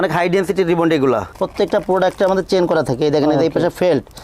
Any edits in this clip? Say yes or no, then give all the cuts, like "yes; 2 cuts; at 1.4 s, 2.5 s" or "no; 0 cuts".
yes; 1 cut; at 1.3 s